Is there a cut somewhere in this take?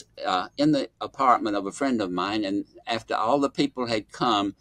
no; 0 cuts

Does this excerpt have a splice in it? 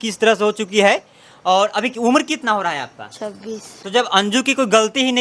yes; 1 cut; at 3.7 s

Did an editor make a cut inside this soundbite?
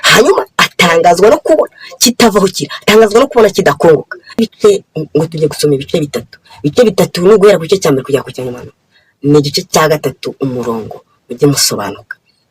yes; 1 cut; at 4.3 s

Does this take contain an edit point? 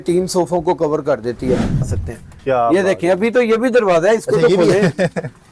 yes; 1 cut; at 1.9 s

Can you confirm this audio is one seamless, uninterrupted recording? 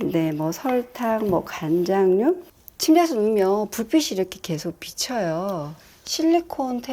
no; 2 cuts; at 2.5 s, 5.8 s

